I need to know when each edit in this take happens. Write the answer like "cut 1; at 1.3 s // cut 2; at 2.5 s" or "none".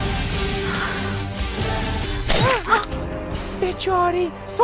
cut 1; at 2.0 s